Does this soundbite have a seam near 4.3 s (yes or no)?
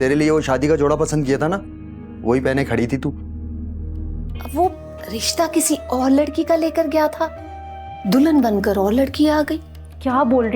yes